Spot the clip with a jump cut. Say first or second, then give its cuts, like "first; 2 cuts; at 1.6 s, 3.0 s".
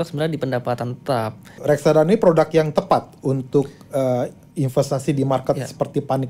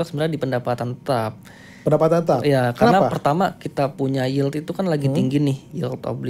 first; 1 cut; at 1.6 s